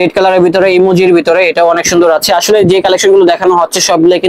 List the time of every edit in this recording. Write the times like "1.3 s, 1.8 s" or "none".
none